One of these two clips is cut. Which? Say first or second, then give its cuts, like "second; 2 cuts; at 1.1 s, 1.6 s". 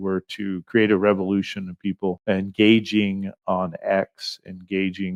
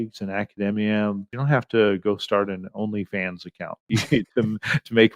second; 2 cuts; at 1.3 s, 3.9 s